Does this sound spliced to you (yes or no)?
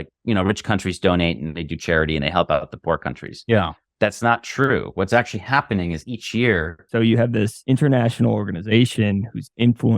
yes